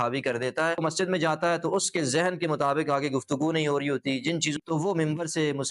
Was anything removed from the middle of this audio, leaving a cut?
yes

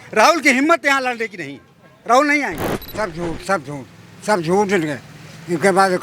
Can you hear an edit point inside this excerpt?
yes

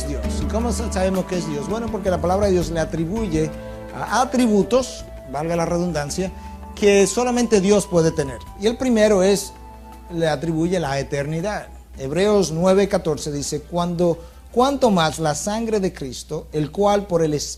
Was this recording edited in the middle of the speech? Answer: no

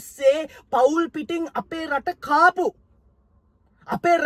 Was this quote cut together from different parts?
no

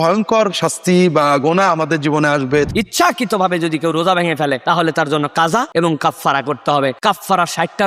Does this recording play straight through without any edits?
no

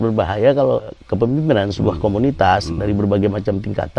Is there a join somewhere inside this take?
yes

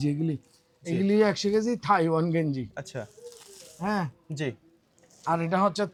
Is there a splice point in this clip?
no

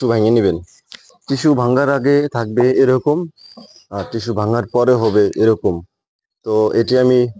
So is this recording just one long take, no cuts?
yes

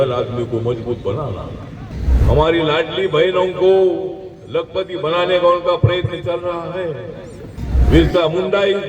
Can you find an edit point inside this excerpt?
yes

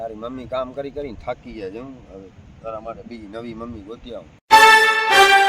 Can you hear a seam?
yes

